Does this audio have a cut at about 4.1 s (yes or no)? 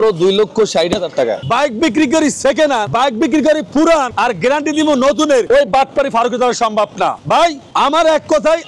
yes